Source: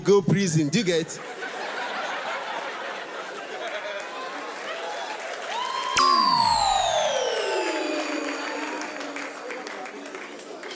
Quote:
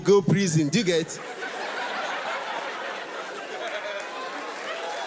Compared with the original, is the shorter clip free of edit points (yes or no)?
yes